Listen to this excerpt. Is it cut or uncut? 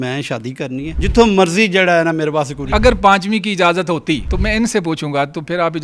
cut